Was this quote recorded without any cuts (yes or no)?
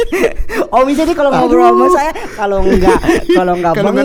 yes